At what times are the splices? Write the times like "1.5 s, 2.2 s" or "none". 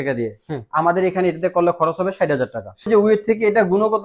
2.9 s